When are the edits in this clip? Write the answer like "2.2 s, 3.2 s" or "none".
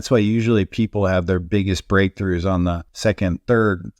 2.9 s